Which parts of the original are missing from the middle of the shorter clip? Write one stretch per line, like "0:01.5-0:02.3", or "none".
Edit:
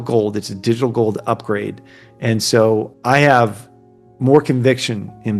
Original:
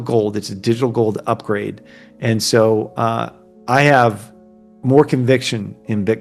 0:02.9-0:03.5

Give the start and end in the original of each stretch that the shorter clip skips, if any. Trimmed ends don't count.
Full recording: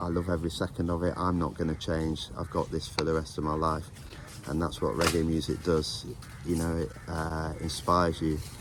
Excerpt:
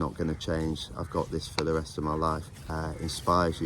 0:04.1-0:07.3

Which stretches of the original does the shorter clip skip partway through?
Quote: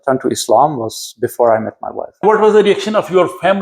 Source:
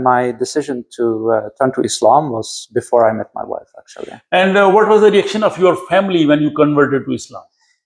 0:03.8-0:04.7

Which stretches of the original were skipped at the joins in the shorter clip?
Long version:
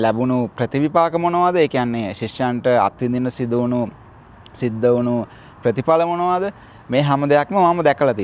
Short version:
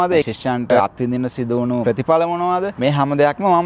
0:02.2-0:02.7
0:03.8-0:05.6
0:06.5-0:06.8

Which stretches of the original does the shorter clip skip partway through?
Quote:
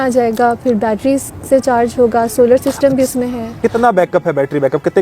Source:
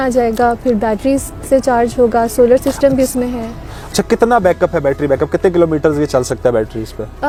0:03.5-0:04.0

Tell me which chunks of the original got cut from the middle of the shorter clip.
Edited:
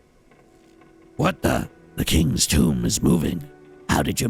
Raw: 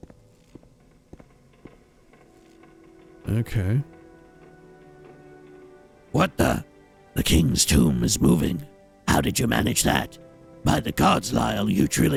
0:03.0-0:06.1
0:06.7-0:07.0

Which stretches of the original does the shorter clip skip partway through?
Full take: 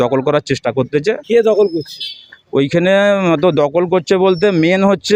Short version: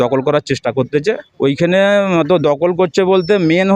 0:01.2-0:02.4

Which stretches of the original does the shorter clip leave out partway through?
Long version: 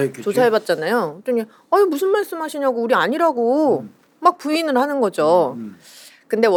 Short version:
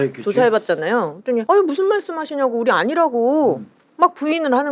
0:01.4-0:01.7

